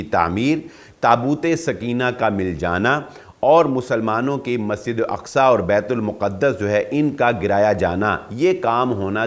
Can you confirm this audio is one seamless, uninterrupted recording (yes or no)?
yes